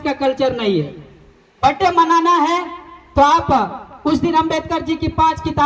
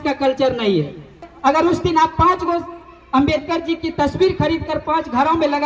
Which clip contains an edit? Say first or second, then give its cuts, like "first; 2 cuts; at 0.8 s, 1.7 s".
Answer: second; 1 cut; at 1.2 s